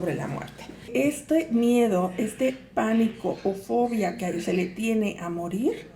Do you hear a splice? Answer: yes; 1 cut; at 0.9 s

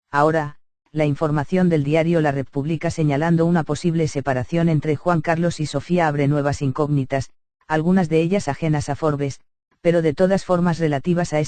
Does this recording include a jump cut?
yes; 1 cut; at 3.8 s

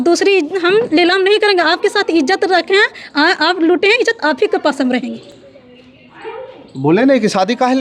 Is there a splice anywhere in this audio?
no; 0 cuts

